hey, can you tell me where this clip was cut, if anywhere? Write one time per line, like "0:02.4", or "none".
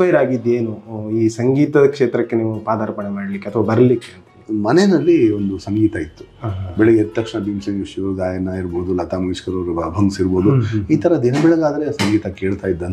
0:04.4